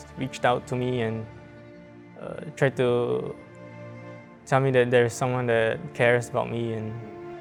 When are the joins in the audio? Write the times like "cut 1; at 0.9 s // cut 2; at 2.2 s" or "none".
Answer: none

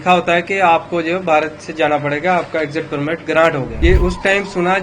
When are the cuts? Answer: cut 1; at 3.7 s

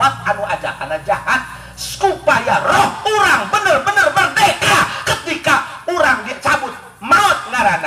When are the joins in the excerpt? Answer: none

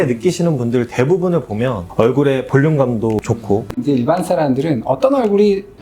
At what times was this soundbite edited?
cut 1; at 1.8 s // cut 2; at 3.7 s

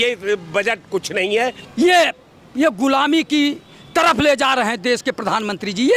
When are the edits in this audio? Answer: cut 1; at 1.6 s

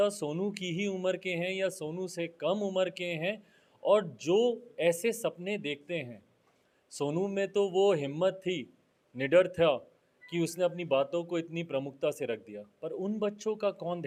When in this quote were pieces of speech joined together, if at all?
none

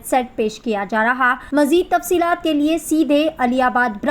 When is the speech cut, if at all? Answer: cut 1; at 1.4 s

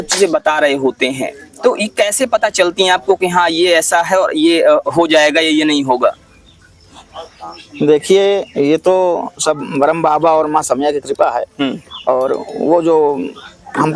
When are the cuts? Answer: none

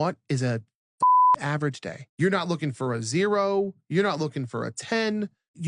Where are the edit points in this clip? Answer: cut 1; at 2.4 s

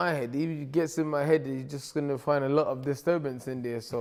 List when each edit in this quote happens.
none

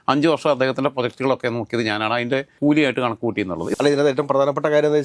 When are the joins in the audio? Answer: cut 1; at 2.6 s // cut 2; at 3.8 s

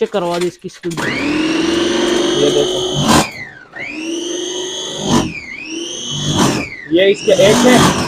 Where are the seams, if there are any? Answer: none

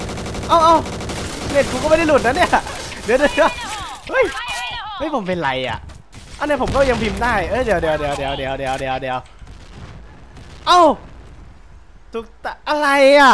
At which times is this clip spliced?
none

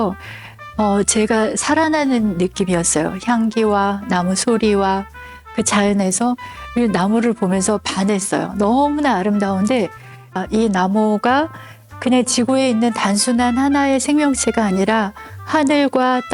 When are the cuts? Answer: cut 1; at 10.4 s

